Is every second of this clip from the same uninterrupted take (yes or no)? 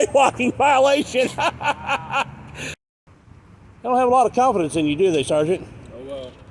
no